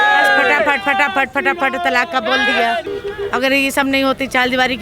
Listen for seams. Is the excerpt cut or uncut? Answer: cut